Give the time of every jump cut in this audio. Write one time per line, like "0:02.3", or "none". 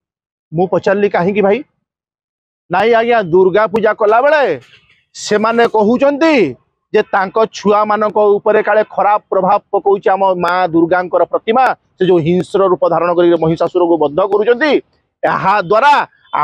none